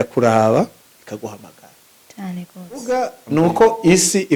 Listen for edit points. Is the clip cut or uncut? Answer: cut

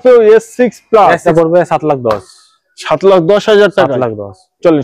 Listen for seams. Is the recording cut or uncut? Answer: cut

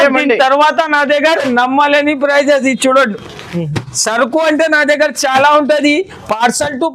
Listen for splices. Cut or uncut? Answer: cut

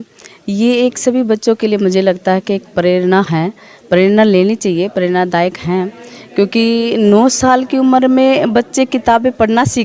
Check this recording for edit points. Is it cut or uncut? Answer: uncut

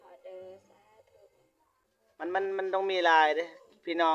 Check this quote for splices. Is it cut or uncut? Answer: cut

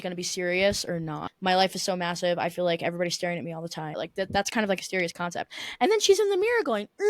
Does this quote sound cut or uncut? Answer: cut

